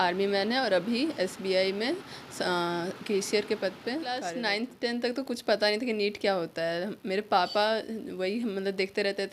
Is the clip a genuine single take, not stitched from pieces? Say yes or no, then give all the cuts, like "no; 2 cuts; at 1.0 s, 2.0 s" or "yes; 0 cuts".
no; 1 cut; at 4.3 s